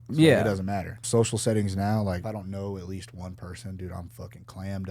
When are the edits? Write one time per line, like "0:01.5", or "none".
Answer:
0:01.0
0:02.2